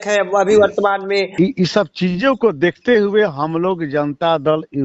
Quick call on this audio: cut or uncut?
cut